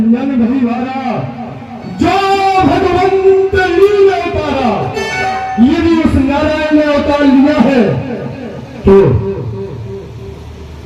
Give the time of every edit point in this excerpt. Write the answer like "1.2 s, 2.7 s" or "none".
none